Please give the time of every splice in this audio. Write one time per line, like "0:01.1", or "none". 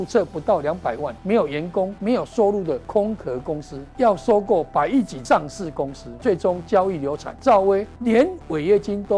0:01.1
0:02.0
0:02.8
0:03.8
0:05.2
0:06.0
0:07.3
0:07.9